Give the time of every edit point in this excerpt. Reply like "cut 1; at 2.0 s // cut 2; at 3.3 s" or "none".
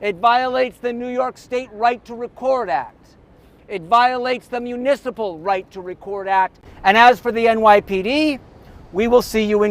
cut 1; at 6.6 s